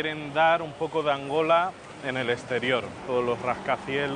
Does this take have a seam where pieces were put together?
no; 0 cuts

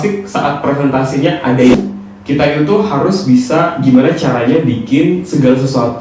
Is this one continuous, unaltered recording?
no; 1 cut; at 1.7 s

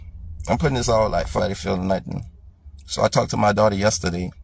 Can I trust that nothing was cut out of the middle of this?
no; 1 cut; at 1.4 s

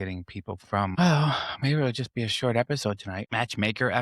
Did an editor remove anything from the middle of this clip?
yes; 2 cuts; at 0.9 s, 3.2 s

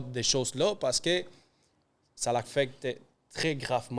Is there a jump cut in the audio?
no; 0 cuts

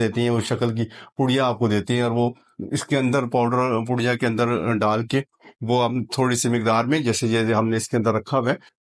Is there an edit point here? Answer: no; 0 cuts

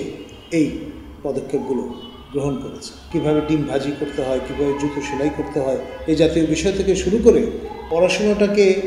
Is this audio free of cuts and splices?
no; 2 cuts; at 2.9 s, 7.7 s

